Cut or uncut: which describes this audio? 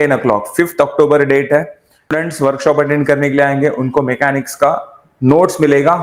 cut